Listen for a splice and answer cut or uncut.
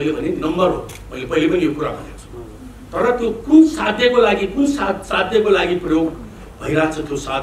uncut